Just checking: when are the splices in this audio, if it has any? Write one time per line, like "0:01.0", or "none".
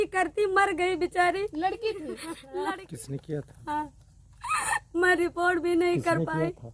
0:02.7